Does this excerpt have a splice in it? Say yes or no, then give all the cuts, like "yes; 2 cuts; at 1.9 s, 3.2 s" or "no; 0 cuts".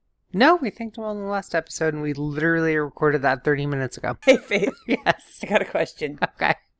yes; 1 cut; at 4.1 s